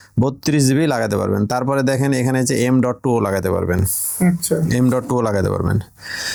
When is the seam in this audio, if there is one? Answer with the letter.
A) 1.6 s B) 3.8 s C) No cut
C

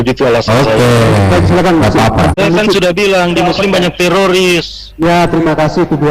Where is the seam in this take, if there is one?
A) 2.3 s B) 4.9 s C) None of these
A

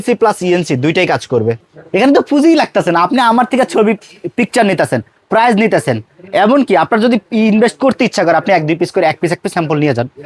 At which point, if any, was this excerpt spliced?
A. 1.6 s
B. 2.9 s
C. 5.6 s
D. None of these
A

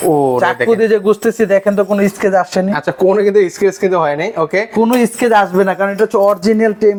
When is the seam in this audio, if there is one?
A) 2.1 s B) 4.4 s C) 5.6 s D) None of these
D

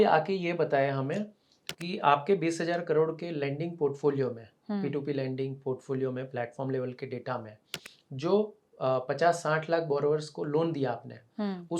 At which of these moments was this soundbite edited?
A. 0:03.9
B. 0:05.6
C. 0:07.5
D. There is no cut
D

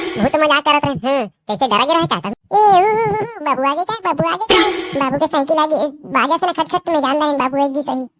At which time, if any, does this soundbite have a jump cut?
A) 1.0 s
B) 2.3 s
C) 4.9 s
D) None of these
B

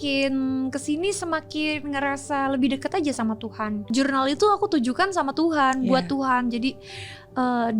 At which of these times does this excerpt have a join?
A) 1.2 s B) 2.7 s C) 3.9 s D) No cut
C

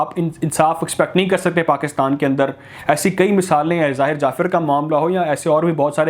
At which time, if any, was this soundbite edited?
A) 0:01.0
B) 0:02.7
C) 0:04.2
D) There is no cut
D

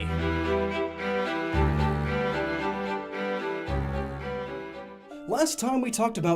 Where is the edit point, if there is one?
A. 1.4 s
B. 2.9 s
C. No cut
B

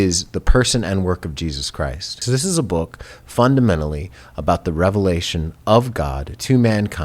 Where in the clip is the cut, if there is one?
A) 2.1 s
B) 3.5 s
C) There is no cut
A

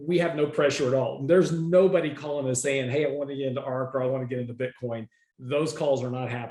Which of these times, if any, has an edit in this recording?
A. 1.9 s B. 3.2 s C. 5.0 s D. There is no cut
D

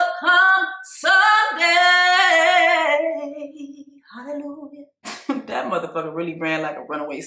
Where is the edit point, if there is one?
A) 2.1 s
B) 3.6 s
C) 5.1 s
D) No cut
C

